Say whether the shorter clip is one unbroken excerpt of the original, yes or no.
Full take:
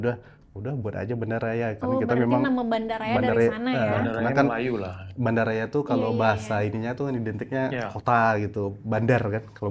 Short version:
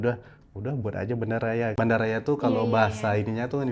no